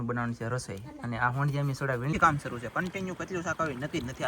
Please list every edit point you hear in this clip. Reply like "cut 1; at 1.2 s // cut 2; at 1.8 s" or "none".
cut 1; at 2.1 s